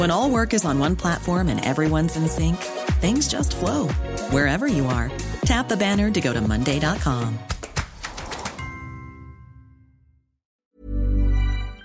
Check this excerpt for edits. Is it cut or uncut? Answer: cut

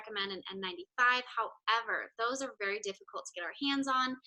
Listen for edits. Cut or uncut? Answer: uncut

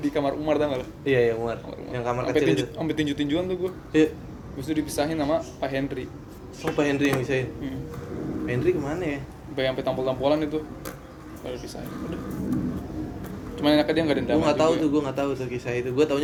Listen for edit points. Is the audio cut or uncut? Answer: uncut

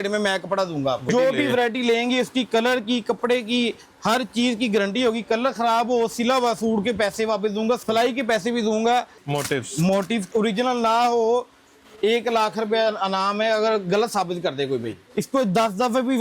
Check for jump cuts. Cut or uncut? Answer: cut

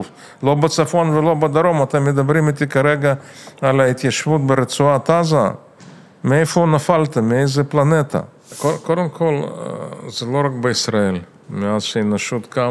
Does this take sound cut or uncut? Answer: cut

